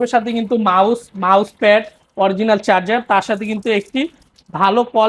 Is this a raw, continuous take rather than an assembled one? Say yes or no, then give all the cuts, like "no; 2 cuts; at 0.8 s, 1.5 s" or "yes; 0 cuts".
yes; 0 cuts